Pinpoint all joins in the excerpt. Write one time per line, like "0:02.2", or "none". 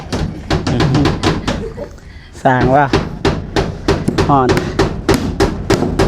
none